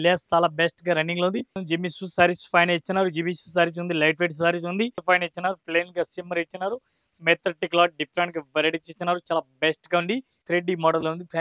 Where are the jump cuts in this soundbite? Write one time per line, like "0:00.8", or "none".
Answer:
0:01.6
0:05.0
0:10.3